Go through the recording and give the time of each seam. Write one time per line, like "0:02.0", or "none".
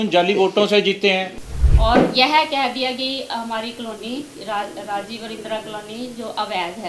0:01.4

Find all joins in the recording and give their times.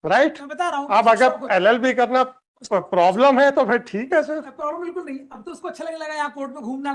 none

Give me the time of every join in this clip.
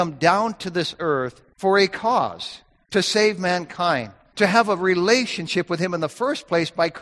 0:01.4
0:04.2

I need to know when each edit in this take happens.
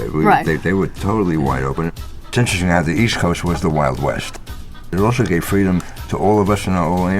0:01.9
0:04.4
0:06.0

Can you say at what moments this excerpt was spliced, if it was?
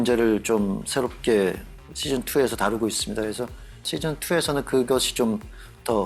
0:03.8

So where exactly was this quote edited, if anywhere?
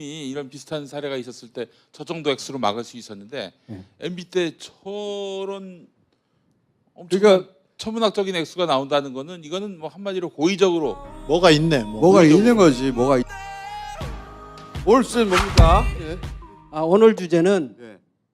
0:13.2

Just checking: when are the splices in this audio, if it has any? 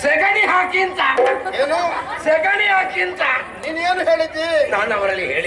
none

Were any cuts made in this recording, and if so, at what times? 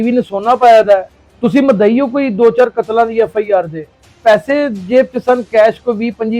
0:01.2
0:04.1

